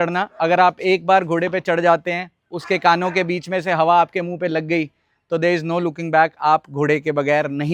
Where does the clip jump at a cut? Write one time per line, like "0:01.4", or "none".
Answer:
none